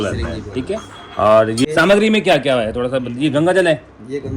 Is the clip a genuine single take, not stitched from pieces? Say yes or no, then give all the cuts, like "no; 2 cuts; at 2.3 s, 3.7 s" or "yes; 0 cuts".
no; 1 cut; at 1.6 s